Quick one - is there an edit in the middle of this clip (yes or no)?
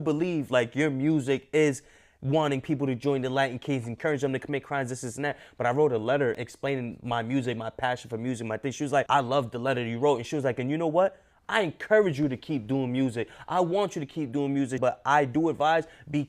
yes